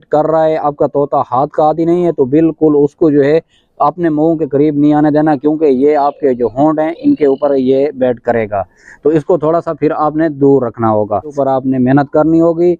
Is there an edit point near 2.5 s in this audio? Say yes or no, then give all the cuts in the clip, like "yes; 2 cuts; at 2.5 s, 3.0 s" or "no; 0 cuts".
no; 1 cut; at 11.4 s